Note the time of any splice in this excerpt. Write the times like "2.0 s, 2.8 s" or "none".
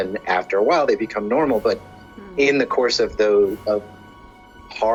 none